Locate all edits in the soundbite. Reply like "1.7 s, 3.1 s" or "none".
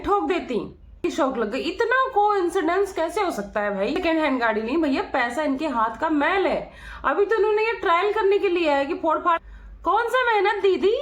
1.0 s, 4.0 s, 9.4 s